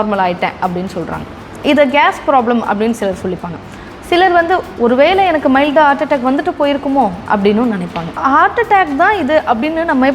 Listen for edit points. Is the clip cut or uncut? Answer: cut